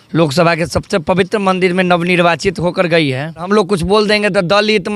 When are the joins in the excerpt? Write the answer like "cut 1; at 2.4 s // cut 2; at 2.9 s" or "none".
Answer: cut 1; at 3.5 s